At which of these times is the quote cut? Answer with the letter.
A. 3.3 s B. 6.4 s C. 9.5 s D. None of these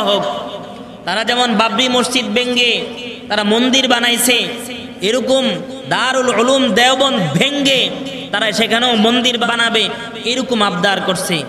C